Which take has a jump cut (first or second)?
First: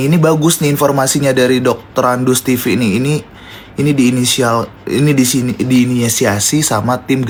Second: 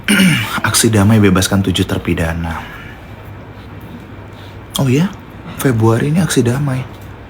second